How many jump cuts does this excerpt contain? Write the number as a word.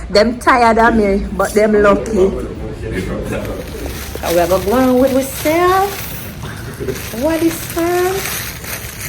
one